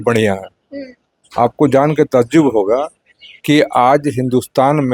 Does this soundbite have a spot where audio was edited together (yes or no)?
no